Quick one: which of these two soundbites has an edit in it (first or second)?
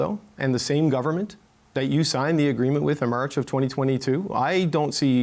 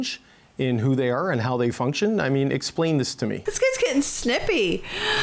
second